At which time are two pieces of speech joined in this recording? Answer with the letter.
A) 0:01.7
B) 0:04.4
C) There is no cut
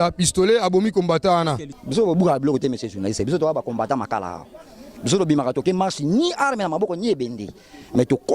A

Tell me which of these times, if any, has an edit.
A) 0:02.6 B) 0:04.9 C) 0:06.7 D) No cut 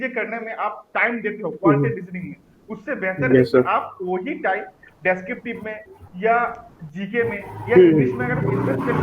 D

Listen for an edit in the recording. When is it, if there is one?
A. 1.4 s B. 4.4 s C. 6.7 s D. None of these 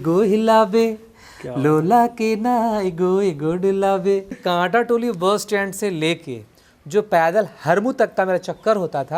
B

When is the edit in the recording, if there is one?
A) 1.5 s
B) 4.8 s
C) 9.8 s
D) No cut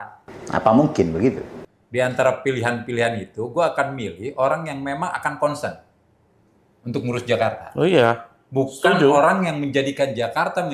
A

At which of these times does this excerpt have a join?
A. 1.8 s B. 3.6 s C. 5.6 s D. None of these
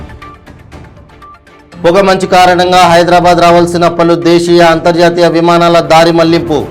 A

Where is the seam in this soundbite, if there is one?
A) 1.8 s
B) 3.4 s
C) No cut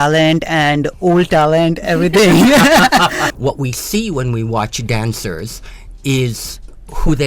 B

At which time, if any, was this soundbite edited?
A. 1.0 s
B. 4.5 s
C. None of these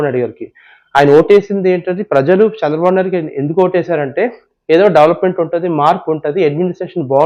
C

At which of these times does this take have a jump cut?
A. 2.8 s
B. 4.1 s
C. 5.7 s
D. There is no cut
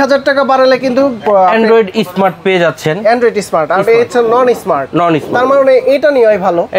D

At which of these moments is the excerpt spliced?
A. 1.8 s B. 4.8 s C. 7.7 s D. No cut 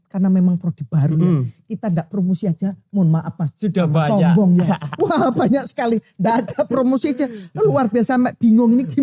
D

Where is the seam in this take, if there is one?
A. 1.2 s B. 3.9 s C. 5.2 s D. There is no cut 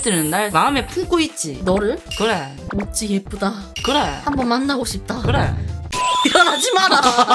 D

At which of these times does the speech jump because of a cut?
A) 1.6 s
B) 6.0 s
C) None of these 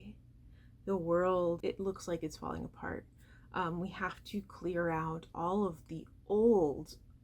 A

